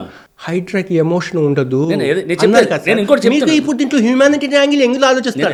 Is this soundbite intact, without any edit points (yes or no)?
yes